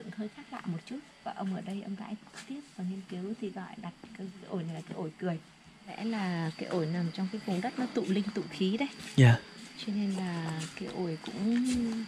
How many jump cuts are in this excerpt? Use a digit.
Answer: 1